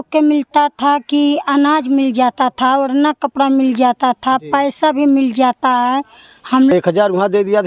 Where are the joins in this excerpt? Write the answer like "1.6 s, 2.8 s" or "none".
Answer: 6.7 s